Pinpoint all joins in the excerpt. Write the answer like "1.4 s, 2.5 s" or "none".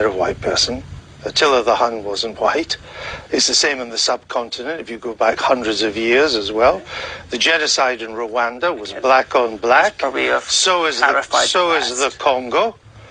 none